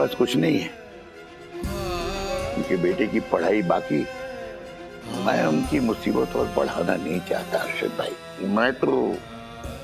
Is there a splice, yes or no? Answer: yes